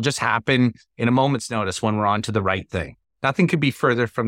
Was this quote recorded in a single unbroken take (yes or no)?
no